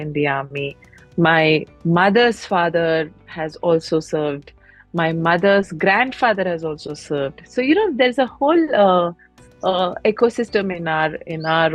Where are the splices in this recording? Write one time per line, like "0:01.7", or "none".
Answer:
none